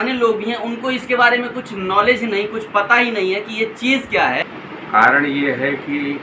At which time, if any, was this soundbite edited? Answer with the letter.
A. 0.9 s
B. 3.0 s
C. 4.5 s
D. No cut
C